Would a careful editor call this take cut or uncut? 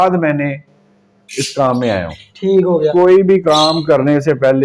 cut